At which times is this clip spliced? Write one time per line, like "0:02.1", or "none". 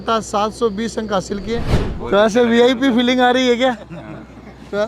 0:01.8

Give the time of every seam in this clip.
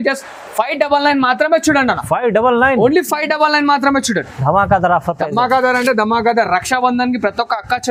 none

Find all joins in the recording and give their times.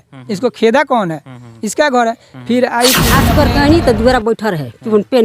0:03.2

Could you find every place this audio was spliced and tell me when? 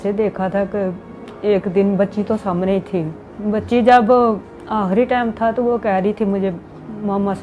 none

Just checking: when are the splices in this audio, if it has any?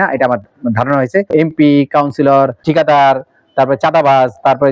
0:01.3

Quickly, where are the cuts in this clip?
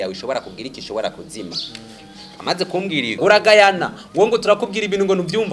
0:03.1

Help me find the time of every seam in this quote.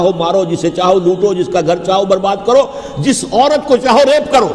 none

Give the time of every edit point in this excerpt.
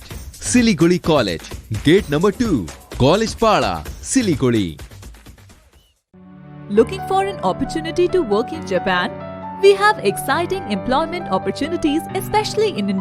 none

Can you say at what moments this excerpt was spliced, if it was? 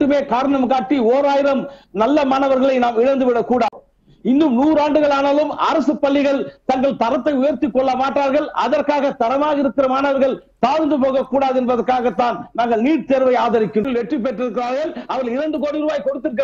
0:03.8
0:13.8

